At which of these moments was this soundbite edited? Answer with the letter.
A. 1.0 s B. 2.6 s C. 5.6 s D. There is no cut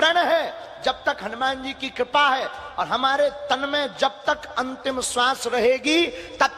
B